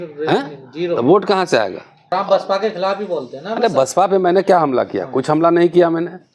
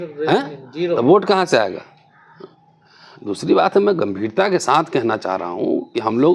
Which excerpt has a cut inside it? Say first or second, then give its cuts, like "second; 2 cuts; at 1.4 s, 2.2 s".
first; 1 cut; at 1.9 s